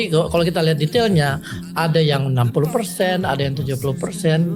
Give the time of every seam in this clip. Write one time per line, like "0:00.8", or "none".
none